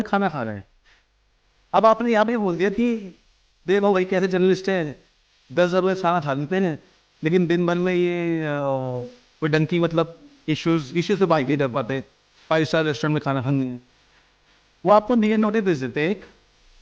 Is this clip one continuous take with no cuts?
yes; 0 cuts

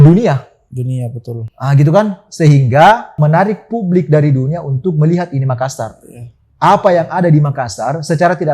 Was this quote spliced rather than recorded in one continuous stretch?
yes; 1 cut; at 3.2 s

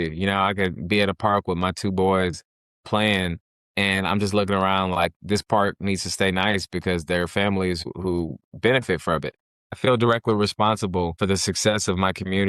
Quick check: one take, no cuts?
no; 3 cuts; at 7.8 s, 9.7 s, 11.2 s

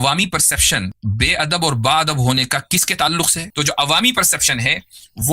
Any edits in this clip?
yes; 2 cuts; at 1.0 s, 3.4 s

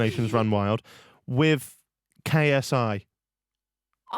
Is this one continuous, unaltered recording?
yes; 0 cuts

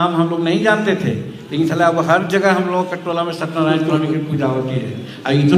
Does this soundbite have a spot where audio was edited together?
no; 0 cuts

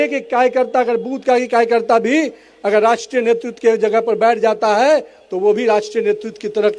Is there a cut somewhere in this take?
no; 0 cuts

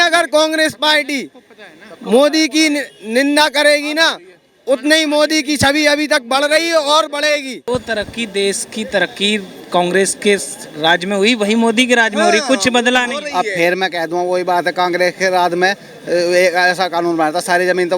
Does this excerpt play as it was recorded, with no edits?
no; 1 cut; at 7.5 s

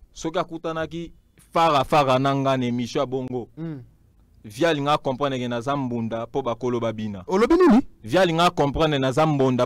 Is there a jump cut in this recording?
no; 0 cuts

